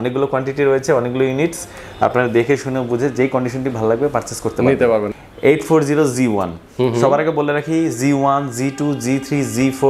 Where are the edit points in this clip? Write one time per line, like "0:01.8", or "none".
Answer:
0:05.1